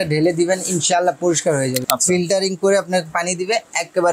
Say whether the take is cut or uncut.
cut